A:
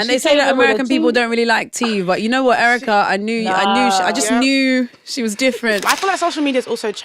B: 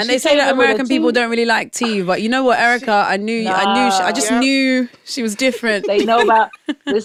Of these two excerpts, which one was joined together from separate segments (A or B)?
A